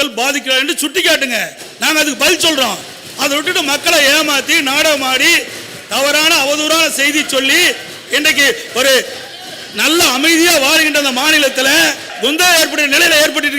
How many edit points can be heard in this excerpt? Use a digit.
1